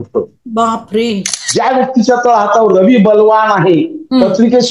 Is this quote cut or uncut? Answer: cut